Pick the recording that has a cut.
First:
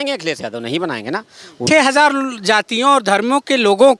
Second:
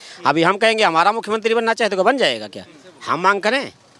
first; 1 cut; at 1.6 s

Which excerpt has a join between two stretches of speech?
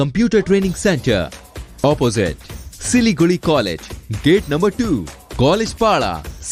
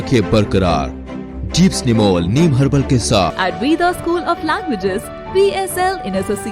second; 1 cut; at 3.3 s

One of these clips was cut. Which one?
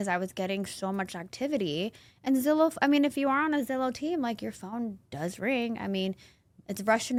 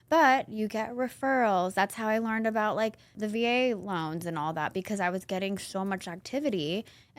second; 1 cut; at 3.2 s

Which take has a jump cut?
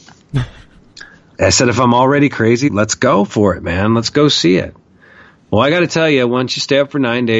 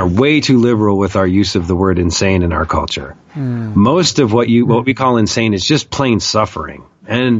first; 2 cuts; at 1.3 s, 2.7 s

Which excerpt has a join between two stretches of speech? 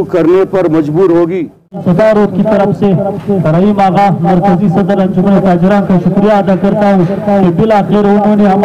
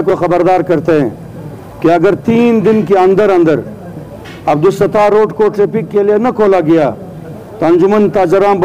first; 1 cut; at 1.8 s

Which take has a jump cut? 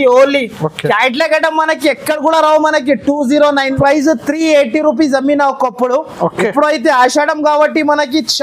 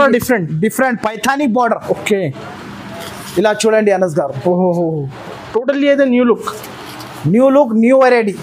first; 1 cut; at 3.7 s

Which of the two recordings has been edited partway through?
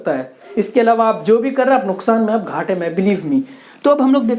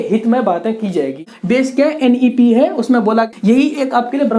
second; 2 cuts; at 1.2 s, 3.3 s

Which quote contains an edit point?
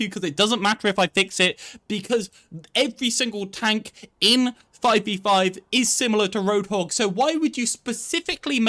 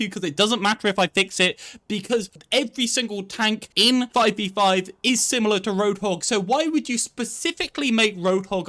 second; 2 cuts; at 2.4 s, 3.9 s

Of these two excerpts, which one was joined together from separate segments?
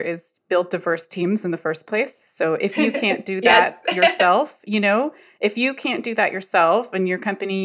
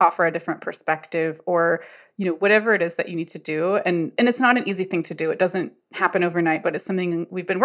second; 1 cut; at 4.1 s

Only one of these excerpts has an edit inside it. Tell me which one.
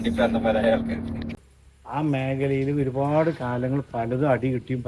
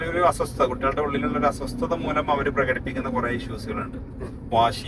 first; 1 cut; at 1.2 s

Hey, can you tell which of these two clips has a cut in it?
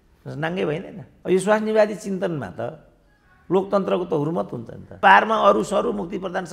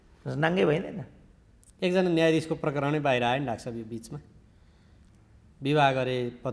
first; 2 cuts; at 1.0 s, 5.0 s

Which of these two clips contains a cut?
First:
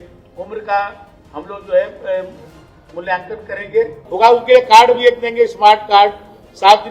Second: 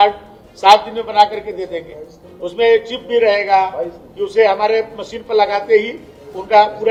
first; 1 cut; at 4.0 s

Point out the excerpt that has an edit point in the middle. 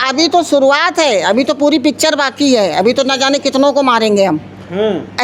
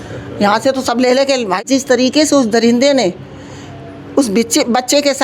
second; 1 cut; at 1.6 s

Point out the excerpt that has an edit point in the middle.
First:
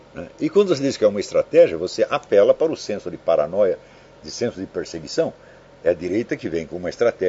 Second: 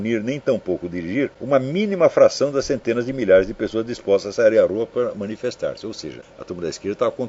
second; 2 cuts; at 1.4 s, 6.3 s

